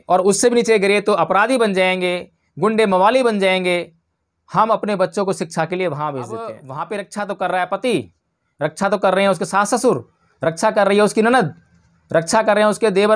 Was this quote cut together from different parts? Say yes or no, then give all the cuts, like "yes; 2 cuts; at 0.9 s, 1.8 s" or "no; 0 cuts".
yes; 1 cut; at 6.7 s